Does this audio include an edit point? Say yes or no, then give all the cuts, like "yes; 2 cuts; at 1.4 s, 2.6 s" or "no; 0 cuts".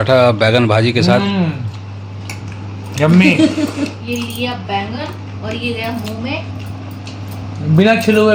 no; 0 cuts